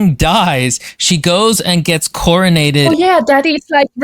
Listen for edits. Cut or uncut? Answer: cut